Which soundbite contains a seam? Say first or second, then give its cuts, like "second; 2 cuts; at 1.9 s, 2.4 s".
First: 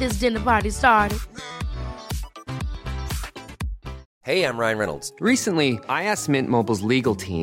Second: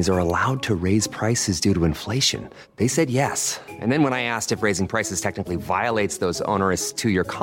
first; 1 cut; at 4.1 s